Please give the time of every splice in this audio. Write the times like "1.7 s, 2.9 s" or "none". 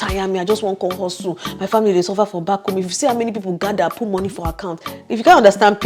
none